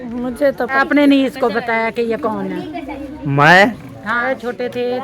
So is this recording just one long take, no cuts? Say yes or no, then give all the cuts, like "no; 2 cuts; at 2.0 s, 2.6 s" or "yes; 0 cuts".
no; 2 cuts; at 0.8 s, 4.1 s